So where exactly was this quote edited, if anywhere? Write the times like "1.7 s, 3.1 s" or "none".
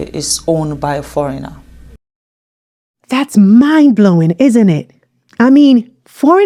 none